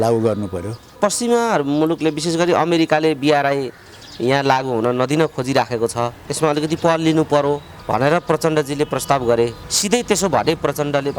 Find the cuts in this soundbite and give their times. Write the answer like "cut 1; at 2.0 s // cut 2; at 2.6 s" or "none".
cut 1; at 0.9 s // cut 2; at 6.2 s // cut 3; at 7.7 s // cut 4; at 9.7 s